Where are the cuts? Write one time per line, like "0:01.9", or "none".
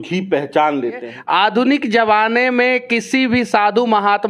0:01.1